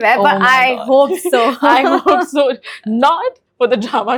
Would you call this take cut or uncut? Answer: uncut